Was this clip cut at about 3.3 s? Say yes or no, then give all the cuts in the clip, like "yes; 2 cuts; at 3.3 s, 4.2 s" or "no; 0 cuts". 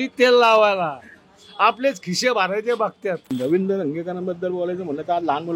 yes; 1 cut; at 3.3 s